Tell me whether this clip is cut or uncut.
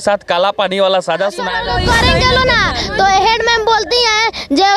cut